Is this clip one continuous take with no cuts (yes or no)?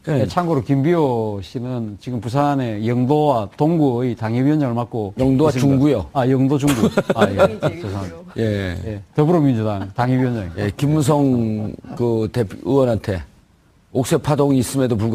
yes